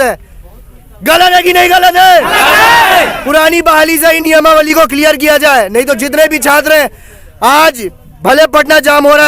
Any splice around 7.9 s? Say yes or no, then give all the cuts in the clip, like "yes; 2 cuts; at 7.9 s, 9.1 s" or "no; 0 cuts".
no; 0 cuts